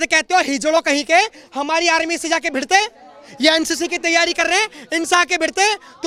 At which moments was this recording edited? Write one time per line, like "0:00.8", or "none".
none